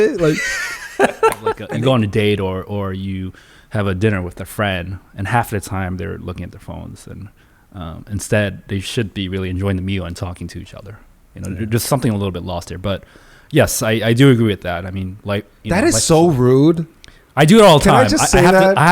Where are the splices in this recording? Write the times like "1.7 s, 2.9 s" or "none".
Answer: 1.6 s